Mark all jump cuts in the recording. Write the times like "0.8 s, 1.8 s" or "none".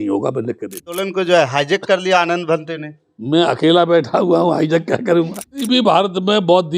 1.0 s, 5.6 s

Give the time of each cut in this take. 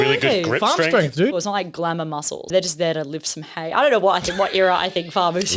1.4 s, 2.5 s

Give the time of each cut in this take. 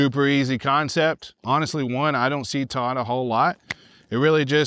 1.3 s

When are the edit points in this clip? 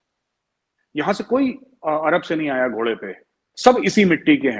3.5 s

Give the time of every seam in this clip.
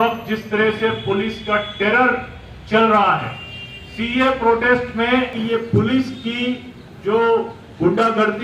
5.4 s

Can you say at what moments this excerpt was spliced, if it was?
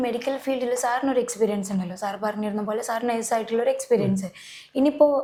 none

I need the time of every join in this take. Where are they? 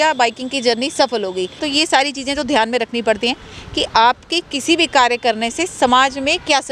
1.7 s

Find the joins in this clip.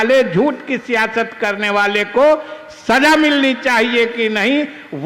none

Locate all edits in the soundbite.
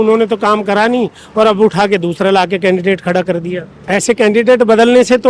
3.8 s

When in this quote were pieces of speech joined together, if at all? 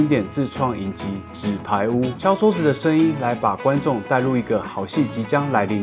2.2 s

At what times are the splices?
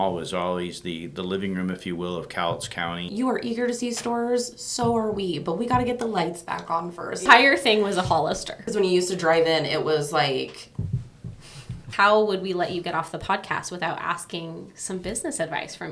3.1 s, 7.2 s, 8.6 s, 11.9 s

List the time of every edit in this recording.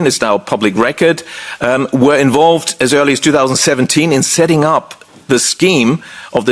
none

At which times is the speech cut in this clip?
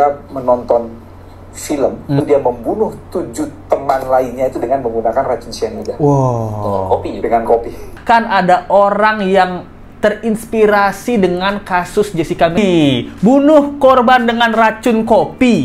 2.2 s, 8.0 s, 12.6 s

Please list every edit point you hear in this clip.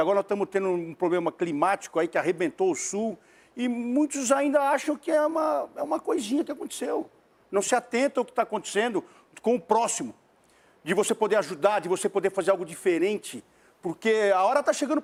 none

